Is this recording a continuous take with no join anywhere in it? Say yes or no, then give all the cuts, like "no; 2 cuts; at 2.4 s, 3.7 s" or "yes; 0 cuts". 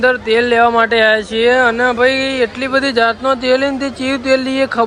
yes; 0 cuts